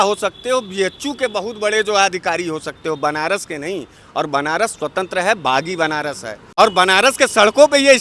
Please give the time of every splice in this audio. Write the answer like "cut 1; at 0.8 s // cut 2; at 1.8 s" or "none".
cut 1; at 6.5 s